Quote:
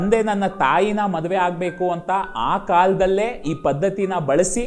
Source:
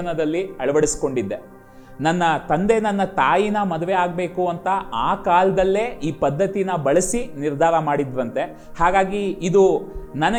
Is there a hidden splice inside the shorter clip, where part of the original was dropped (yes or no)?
no